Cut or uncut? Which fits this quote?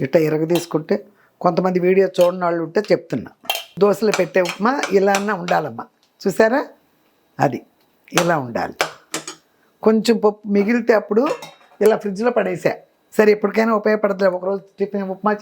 cut